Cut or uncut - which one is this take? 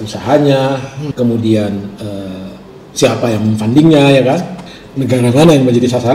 cut